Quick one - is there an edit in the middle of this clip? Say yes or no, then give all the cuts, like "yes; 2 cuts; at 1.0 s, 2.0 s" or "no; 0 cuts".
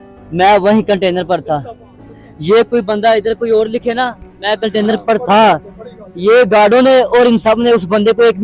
no; 0 cuts